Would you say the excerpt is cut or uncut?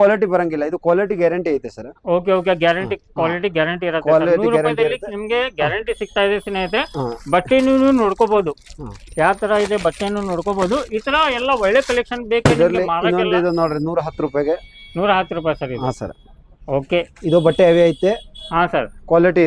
uncut